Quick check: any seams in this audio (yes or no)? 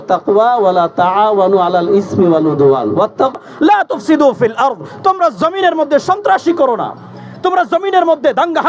yes